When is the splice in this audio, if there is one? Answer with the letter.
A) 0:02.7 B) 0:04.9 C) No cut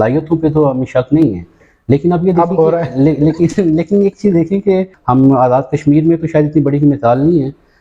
B